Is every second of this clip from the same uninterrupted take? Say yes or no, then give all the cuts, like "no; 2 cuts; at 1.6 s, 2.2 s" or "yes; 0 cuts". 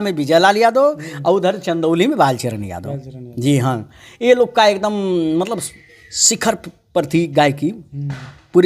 yes; 0 cuts